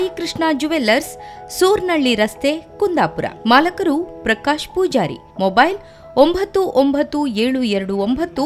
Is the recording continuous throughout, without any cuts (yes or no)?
yes